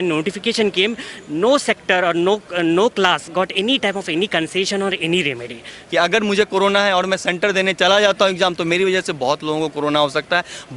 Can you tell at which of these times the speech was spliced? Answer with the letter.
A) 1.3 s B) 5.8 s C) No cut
B